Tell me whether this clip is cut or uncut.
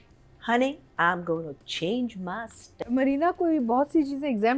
cut